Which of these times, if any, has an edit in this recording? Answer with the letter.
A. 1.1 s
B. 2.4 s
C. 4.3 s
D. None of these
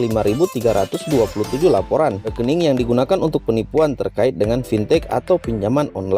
B